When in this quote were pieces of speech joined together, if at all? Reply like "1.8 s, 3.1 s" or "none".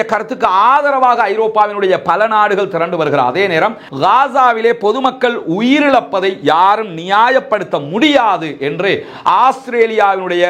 3.8 s